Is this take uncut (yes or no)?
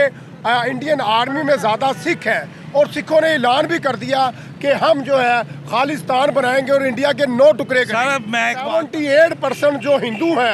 no